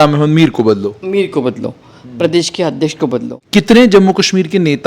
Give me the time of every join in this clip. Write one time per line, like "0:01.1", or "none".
0:03.4